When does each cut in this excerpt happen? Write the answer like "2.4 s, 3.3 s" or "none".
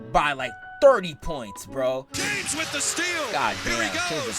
2.1 s